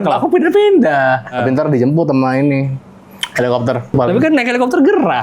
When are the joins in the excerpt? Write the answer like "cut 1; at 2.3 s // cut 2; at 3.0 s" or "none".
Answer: cut 1; at 1.4 s // cut 2; at 3.9 s